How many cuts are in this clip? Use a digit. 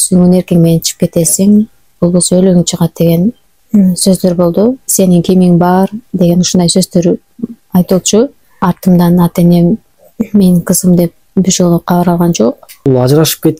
3